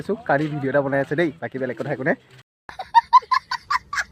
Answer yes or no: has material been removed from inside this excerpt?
yes